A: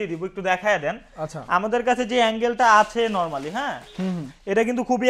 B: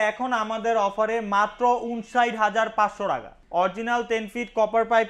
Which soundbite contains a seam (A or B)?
B